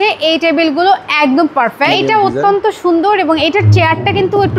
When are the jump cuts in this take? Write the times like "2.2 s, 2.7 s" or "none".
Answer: 1.9 s